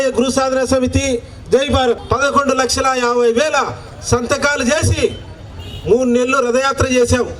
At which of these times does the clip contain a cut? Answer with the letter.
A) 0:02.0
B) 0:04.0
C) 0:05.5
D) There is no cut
A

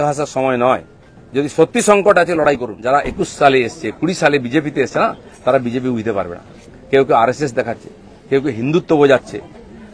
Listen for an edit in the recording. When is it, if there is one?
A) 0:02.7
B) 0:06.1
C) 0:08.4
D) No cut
A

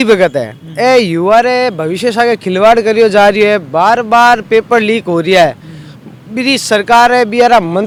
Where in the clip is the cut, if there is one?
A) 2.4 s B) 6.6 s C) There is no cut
C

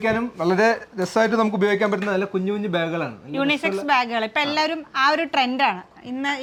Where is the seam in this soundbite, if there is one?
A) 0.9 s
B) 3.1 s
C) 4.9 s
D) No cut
D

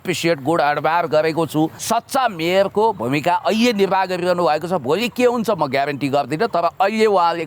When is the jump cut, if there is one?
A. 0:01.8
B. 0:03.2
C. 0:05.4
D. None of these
A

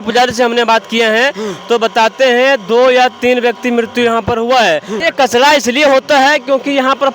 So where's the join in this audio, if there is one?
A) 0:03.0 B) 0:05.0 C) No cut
B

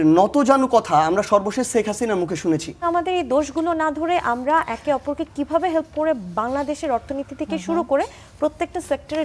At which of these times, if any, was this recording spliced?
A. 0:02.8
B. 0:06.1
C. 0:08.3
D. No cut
A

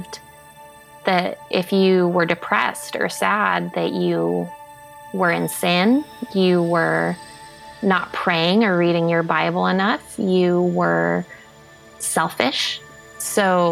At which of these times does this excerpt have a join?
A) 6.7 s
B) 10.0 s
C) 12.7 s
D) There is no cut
C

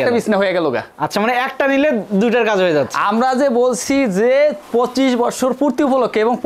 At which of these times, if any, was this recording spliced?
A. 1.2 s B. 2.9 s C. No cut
C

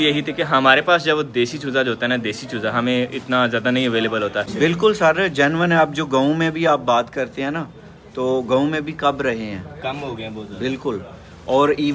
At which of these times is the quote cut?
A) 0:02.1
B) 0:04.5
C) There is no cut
B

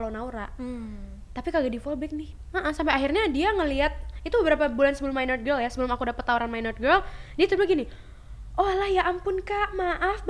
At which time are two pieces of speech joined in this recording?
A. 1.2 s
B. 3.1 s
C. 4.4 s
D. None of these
D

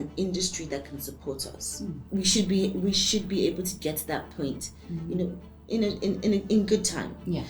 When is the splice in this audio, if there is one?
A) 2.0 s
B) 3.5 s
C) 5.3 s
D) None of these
A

